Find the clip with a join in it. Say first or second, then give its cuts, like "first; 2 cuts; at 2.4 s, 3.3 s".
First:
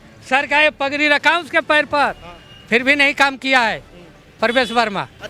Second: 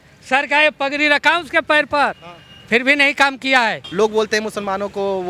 second; 1 cut; at 3.8 s